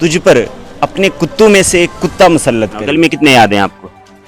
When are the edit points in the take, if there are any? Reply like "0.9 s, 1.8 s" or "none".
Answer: 2.8 s